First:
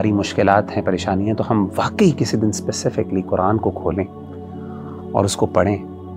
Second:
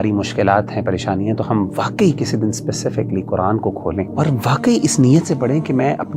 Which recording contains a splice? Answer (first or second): second